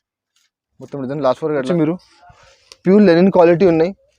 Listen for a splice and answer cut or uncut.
cut